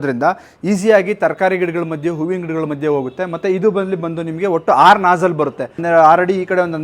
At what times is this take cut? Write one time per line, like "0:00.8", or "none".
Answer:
0:05.8